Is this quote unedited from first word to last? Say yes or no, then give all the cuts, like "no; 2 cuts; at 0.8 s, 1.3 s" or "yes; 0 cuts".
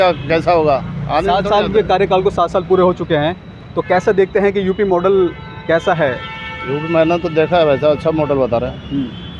yes; 0 cuts